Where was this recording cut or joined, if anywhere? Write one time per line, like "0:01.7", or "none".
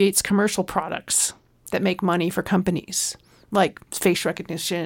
0:03.8

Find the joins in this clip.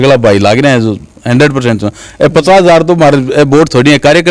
none

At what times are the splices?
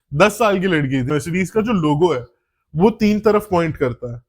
0:01.1

